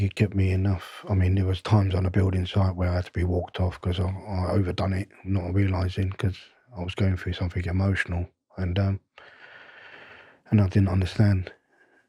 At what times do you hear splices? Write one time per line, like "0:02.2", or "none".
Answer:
none